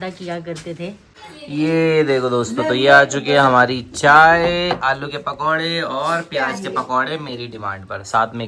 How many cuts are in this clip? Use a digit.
1